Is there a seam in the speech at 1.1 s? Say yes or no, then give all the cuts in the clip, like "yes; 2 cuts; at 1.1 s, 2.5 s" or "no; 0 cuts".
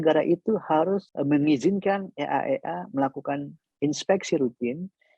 yes; 1 cut; at 1.1 s